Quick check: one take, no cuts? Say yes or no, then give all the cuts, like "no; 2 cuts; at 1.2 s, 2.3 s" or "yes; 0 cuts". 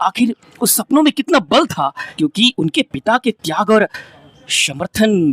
no; 1 cut; at 2.0 s